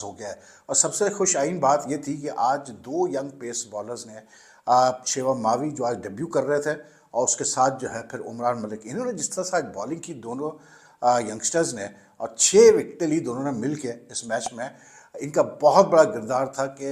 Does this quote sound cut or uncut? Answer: uncut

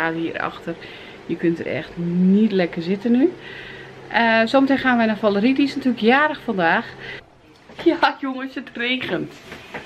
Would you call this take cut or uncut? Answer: cut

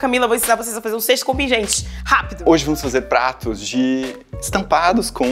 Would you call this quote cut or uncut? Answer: cut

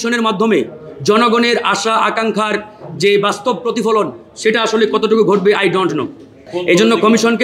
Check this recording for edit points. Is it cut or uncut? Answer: cut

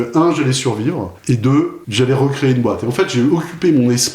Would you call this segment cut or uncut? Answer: cut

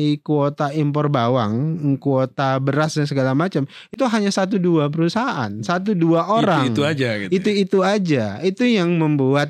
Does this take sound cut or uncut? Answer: uncut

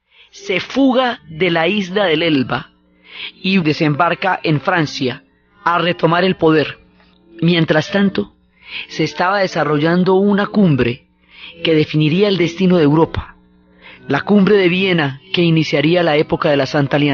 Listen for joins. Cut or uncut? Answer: cut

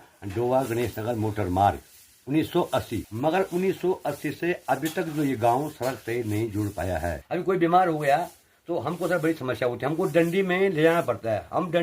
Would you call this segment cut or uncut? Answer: cut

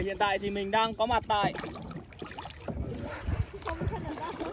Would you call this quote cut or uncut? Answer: uncut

